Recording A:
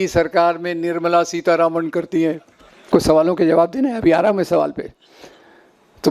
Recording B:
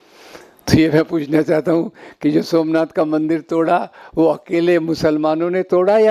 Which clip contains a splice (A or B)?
A